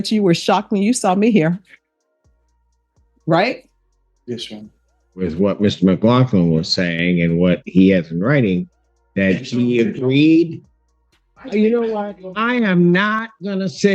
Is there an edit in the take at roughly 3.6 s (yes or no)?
no